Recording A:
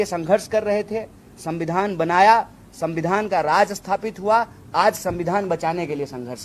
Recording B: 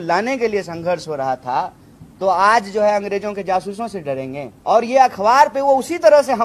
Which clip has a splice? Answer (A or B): B